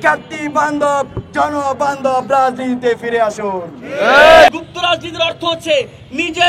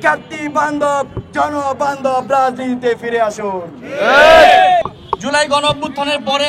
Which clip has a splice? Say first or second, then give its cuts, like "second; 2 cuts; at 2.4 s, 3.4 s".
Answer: first; 1 cut; at 4.5 s